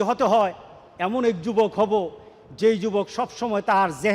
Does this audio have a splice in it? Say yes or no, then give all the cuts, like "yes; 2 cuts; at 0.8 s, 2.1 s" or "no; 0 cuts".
no; 0 cuts